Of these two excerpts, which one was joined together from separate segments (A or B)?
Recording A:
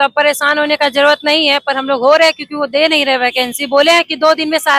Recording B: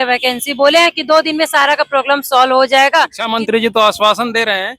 B